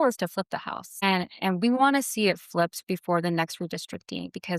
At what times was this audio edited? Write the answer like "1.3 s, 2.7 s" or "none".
1.0 s